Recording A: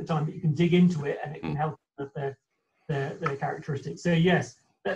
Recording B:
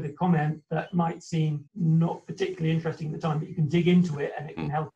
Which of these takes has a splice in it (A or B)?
B